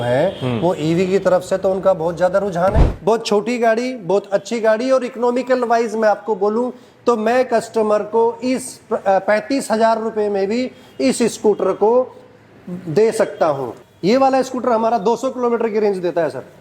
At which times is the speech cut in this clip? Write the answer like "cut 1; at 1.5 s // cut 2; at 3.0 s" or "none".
cut 1; at 2.9 s // cut 2; at 13.7 s